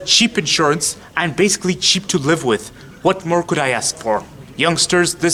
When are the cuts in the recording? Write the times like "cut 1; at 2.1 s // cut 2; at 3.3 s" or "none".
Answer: none